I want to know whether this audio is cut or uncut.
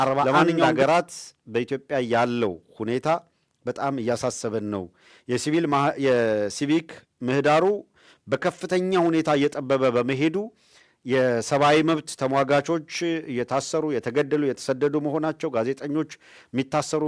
uncut